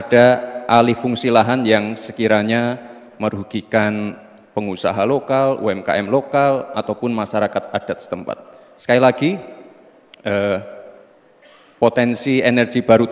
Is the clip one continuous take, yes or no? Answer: yes